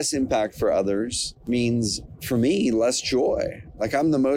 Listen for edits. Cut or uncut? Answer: cut